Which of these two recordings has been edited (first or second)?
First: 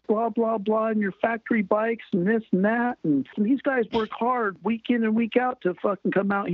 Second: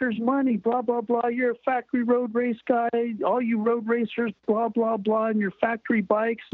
first